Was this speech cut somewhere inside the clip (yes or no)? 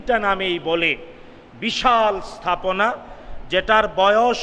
no